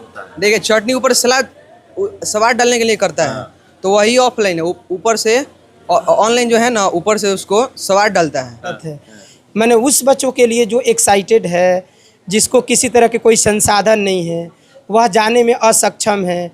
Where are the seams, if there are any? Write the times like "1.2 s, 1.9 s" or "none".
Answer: 8.9 s